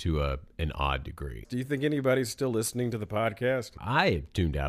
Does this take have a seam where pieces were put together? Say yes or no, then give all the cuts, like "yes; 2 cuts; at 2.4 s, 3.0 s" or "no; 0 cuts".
yes; 2 cuts; at 1.4 s, 3.8 s